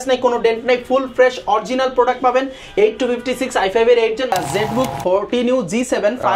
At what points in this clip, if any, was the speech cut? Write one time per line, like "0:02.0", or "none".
0:04.3